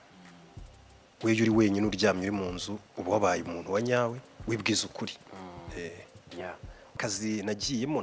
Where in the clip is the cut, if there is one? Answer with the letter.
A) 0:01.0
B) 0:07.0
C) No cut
B